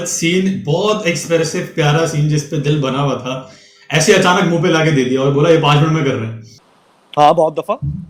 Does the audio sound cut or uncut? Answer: uncut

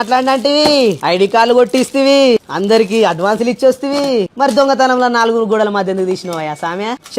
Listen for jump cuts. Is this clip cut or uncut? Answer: cut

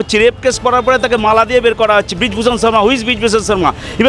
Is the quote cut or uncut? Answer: uncut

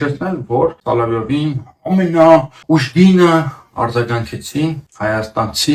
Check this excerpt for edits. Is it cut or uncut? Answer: cut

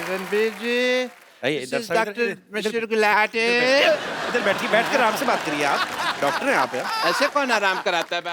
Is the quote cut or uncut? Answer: uncut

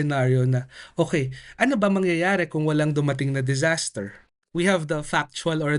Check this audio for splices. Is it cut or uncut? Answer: cut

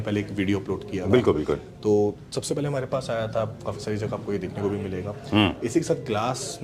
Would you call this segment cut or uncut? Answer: uncut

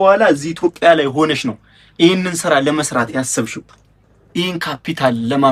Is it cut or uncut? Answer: uncut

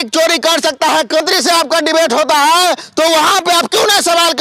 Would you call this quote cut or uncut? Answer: cut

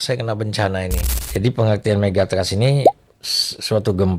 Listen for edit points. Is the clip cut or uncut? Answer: cut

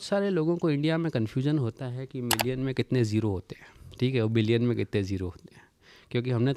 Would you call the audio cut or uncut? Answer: uncut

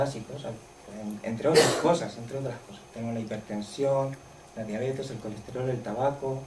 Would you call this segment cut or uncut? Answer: uncut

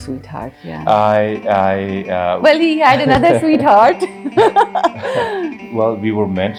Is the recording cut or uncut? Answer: uncut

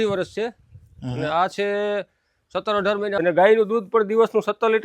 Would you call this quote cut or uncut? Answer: cut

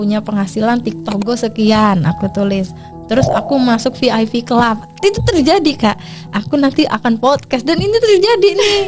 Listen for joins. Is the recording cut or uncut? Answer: uncut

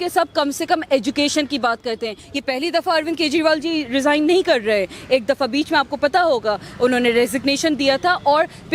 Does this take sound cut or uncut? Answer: cut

